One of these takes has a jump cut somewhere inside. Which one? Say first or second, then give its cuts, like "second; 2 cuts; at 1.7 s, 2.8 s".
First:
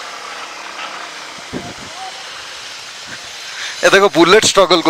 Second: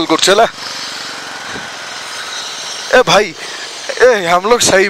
first; 1 cut; at 1.1 s